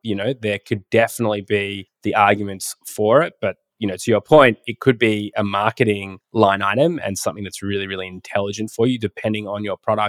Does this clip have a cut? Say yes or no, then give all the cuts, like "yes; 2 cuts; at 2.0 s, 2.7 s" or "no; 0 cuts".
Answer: no; 0 cuts